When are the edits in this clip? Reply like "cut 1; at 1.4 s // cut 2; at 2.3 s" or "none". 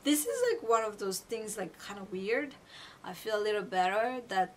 cut 1; at 2.7 s